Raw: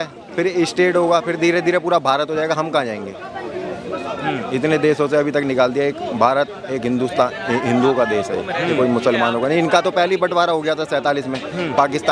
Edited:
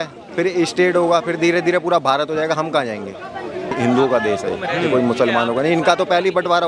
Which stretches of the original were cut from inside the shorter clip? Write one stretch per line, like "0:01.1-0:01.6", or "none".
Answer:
0:03.7-0:07.6